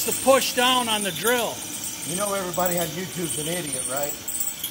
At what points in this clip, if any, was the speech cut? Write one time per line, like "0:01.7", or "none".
none